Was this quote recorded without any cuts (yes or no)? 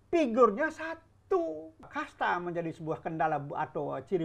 no